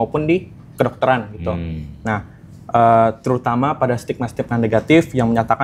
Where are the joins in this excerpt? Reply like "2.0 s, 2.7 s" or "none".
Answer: none